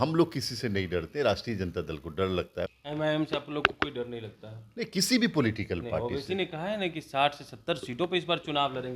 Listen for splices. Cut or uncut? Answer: cut